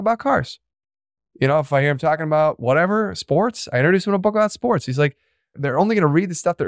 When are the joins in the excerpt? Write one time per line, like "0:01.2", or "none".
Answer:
0:05.6